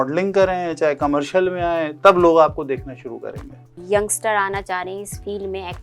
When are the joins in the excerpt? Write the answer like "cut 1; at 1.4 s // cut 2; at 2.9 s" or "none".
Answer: cut 1; at 3.8 s